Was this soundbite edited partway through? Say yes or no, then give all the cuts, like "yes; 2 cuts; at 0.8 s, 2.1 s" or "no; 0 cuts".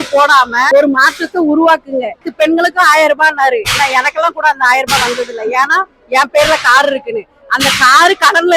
yes; 1 cut; at 2.3 s